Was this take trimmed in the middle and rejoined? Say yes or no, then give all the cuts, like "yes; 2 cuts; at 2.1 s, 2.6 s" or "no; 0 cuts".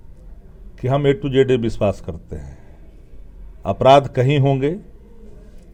no; 0 cuts